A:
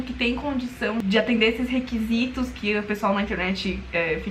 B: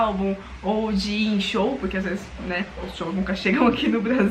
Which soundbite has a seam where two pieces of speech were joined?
A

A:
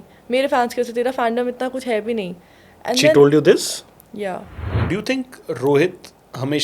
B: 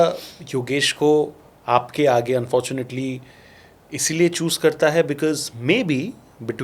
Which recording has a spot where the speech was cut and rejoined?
A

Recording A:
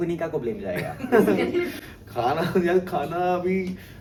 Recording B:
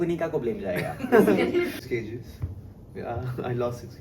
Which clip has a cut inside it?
B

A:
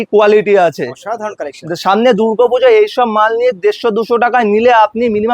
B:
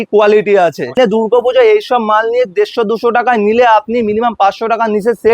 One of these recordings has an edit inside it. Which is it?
B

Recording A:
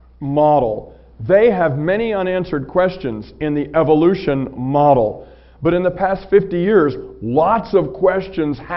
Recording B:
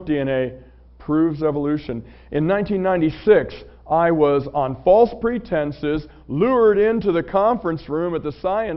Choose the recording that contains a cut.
B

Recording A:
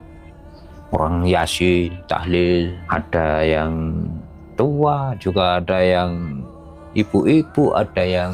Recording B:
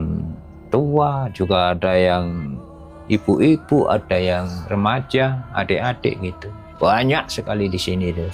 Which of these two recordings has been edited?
A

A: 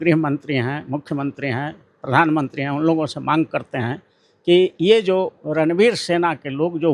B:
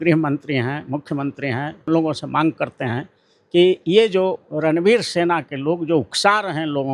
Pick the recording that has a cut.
B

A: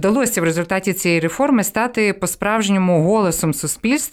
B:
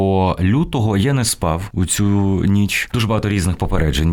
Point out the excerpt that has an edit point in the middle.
B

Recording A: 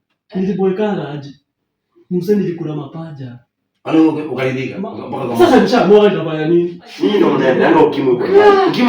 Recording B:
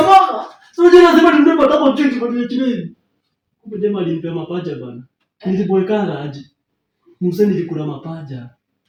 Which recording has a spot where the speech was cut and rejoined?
A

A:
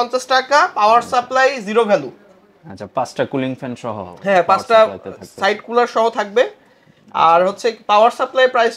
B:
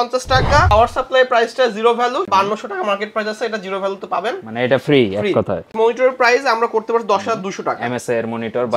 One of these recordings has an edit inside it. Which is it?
B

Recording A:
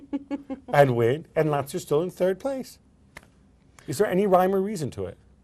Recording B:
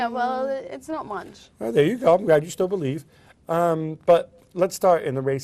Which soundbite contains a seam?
B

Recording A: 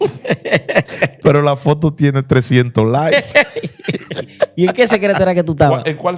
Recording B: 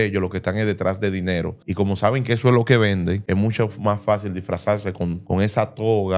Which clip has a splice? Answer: B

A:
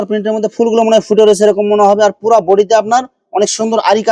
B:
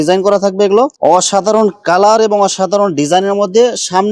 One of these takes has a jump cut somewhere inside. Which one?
B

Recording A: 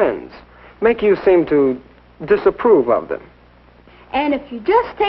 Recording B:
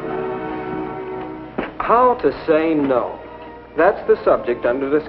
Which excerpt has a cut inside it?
A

